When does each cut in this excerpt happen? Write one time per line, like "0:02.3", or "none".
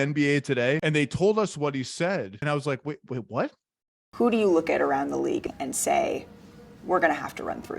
0:00.8
0:02.4
0:05.5